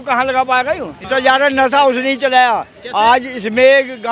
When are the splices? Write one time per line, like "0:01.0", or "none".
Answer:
0:01.0